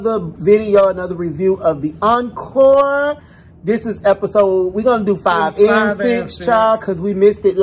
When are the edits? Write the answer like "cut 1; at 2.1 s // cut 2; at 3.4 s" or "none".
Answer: none